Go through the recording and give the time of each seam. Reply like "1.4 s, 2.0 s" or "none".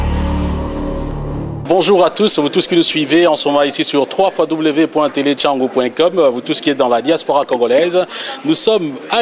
1.1 s